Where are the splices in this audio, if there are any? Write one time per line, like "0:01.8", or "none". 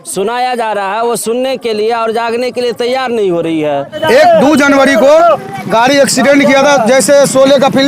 0:04.0